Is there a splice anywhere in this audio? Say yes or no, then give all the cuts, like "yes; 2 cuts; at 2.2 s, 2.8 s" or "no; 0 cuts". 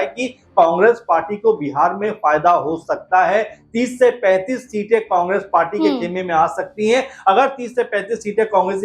no; 0 cuts